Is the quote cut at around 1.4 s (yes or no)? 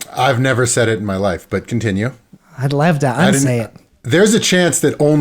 no